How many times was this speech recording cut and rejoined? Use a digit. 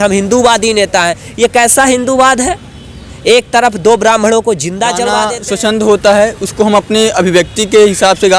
1